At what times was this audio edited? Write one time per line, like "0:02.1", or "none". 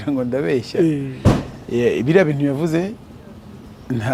none